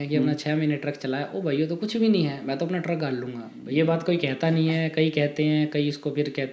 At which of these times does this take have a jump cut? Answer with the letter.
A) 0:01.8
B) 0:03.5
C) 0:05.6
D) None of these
B